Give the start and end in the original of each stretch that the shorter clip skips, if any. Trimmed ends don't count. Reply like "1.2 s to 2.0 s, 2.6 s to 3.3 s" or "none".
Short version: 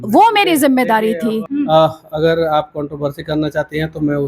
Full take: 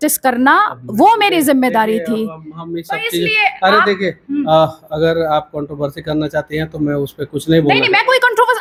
2.3 s to 4.2 s

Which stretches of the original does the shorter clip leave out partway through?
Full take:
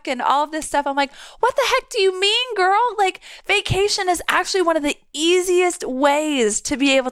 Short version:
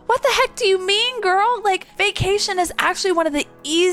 3.2 s to 3.4 s

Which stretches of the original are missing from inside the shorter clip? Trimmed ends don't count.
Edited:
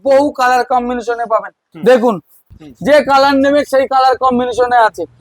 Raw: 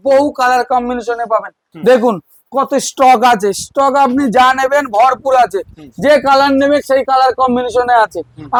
2.4 s to 5.6 s

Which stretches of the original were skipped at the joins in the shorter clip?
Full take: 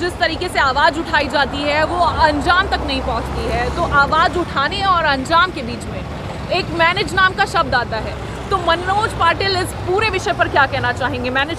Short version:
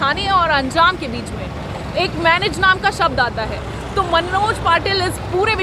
none

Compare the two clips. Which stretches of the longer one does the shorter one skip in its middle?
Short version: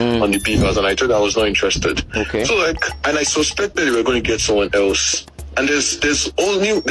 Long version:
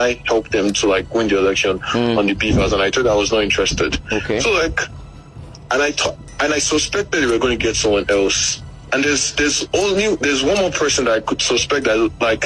4.9 s to 6.3 s

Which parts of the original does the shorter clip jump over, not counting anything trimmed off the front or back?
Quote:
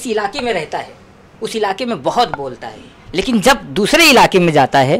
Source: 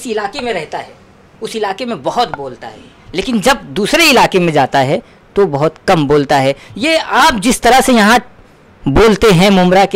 none

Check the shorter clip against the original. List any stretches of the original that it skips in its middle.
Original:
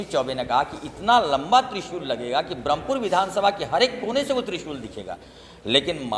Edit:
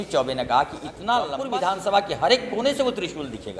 1.4 s to 2.9 s

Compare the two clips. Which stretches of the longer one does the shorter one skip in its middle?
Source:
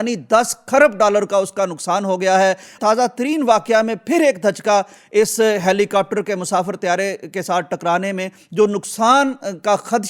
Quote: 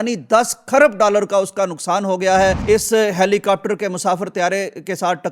2.6 s to 5.1 s

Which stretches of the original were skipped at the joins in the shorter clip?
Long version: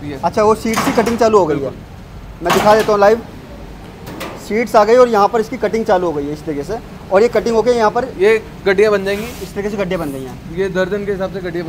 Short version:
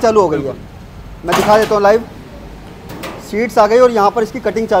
none

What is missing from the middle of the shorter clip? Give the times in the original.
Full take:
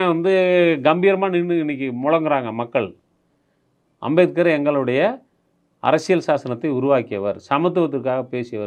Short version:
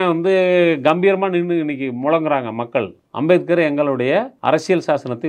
3.0 s to 3.9 s, 5.2 s to 5.7 s

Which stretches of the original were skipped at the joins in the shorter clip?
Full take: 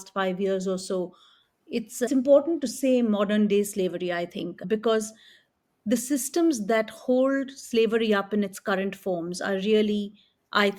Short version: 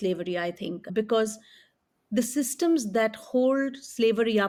none

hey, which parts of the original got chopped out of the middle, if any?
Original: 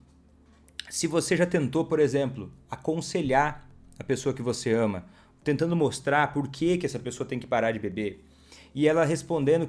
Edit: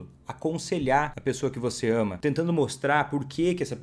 3.6 s to 4.0 s, 5.0 s to 5.4 s

